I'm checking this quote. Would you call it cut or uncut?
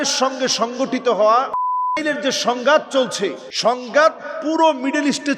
cut